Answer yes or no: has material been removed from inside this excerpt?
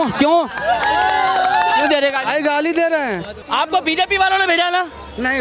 yes